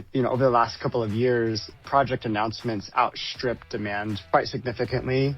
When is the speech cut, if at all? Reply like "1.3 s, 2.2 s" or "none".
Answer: 1.8 s